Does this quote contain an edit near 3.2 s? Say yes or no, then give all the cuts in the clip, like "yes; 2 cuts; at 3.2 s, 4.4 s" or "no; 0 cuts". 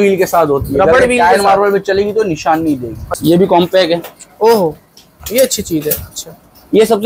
yes; 1 cut; at 3.2 s